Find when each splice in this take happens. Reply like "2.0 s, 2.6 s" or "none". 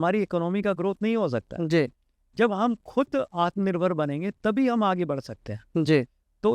none